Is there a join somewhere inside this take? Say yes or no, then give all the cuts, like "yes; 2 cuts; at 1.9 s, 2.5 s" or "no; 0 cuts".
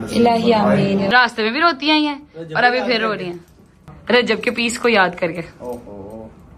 yes; 2 cuts; at 1.1 s, 3.9 s